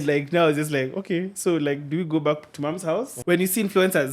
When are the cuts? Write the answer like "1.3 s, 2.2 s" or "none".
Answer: 3.1 s